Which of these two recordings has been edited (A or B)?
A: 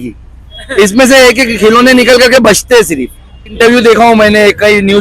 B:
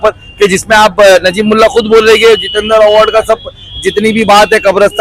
A